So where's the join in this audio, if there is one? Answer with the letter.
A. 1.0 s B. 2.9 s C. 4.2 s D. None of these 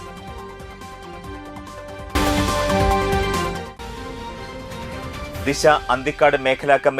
A